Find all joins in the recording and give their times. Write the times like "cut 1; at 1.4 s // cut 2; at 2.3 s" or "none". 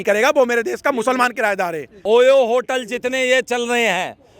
cut 1; at 2.0 s